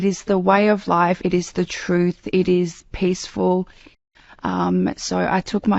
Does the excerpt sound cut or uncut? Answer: cut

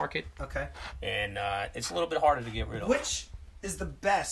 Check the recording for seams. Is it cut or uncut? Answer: cut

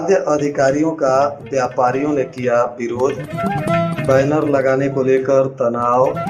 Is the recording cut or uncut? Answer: uncut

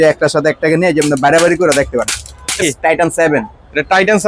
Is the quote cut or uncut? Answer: cut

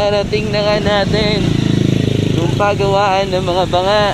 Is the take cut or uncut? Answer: uncut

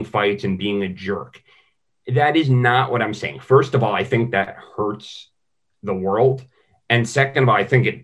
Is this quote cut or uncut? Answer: uncut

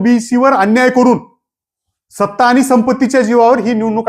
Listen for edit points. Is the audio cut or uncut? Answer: uncut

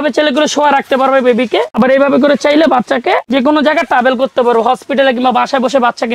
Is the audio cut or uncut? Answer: uncut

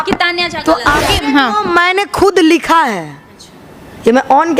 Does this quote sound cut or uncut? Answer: cut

